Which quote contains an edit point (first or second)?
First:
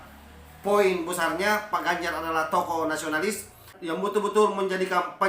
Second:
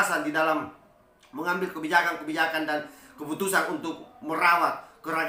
first